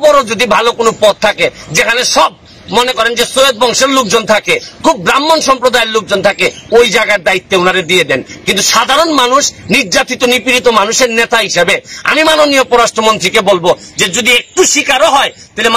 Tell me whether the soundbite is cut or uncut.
uncut